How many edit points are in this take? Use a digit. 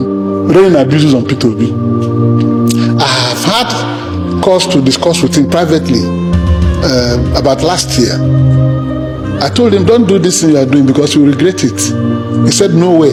0